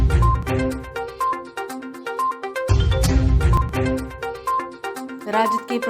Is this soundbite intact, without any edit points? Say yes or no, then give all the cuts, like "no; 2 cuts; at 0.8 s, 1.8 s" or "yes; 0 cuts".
yes; 0 cuts